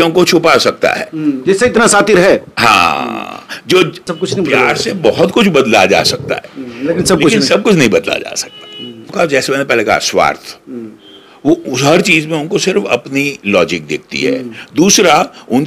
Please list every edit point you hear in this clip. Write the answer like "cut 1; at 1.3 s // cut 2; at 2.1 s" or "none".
cut 1; at 4.1 s // cut 2; at 9.1 s